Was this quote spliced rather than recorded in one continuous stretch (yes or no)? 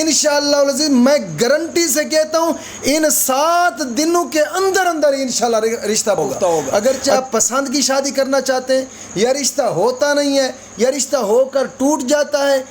yes